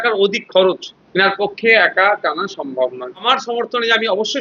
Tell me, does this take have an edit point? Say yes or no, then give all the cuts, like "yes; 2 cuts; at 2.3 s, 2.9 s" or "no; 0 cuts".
yes; 2 cuts; at 0.9 s, 3.3 s